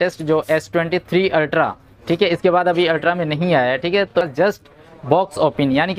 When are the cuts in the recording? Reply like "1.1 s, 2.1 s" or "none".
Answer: 4.1 s